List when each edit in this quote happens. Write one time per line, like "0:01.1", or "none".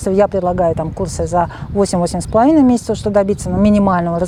none